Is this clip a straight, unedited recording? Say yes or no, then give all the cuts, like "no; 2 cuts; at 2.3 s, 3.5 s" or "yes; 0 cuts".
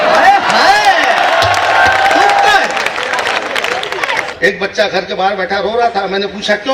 no; 1 cut; at 4.3 s